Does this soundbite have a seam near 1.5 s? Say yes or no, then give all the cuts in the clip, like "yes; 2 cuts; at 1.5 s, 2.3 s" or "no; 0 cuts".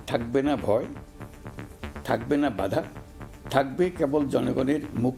no; 0 cuts